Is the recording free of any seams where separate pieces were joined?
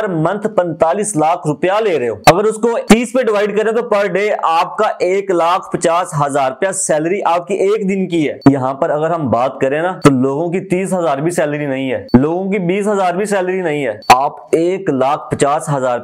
yes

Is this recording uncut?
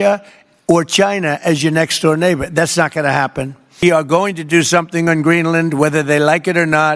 no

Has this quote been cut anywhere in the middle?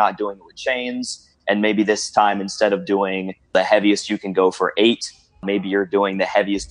yes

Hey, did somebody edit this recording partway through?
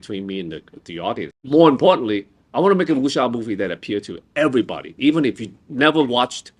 yes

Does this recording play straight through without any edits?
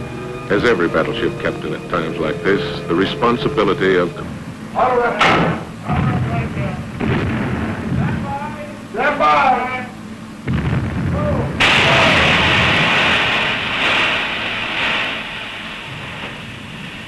yes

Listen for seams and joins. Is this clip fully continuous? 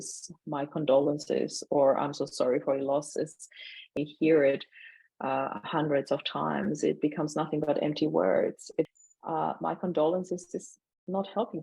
no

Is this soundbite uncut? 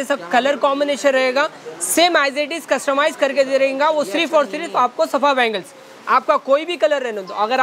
yes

